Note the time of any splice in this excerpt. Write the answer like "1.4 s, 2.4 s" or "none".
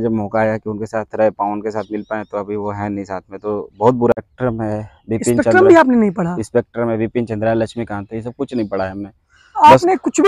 4.2 s